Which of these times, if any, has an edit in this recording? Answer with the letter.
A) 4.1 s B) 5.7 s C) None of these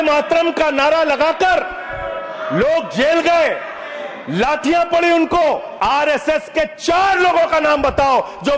B